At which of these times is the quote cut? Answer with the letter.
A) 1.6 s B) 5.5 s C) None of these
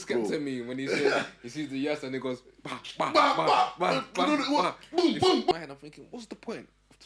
B